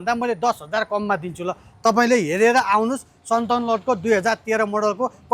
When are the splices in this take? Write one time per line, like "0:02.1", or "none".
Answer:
none